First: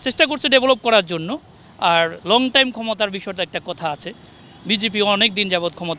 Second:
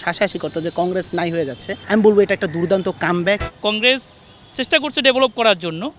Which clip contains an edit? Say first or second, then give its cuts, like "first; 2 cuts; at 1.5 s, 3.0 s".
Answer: second; 1 cut; at 3.4 s